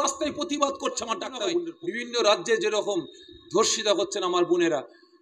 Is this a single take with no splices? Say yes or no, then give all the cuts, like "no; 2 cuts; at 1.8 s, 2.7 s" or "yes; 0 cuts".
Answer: no; 1 cut; at 1.8 s